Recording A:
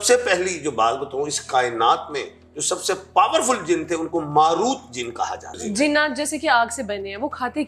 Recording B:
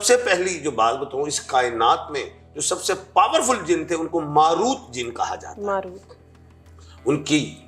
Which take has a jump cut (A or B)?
A